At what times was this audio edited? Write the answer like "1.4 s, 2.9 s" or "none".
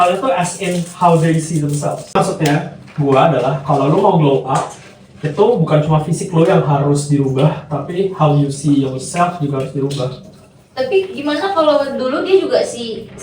2.1 s